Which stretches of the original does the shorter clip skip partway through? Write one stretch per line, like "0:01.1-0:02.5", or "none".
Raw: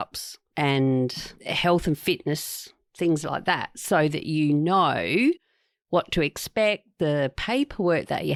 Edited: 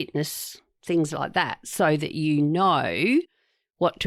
none